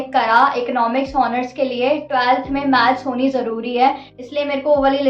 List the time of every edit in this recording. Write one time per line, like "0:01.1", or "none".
none